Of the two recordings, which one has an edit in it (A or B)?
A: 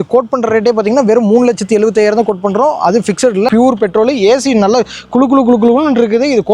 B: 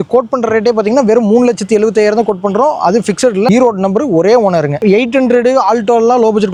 A